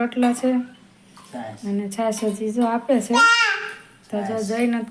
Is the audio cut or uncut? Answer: uncut